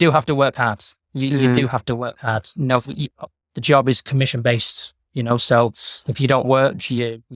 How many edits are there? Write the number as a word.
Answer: zero